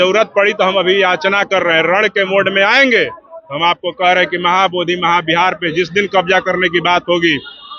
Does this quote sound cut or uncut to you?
uncut